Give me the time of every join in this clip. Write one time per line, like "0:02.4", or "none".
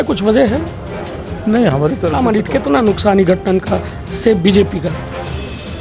0:02.1